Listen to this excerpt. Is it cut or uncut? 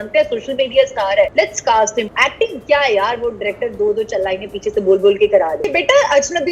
cut